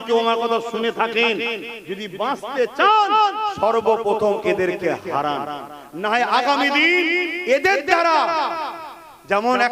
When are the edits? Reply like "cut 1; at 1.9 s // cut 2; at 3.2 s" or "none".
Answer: none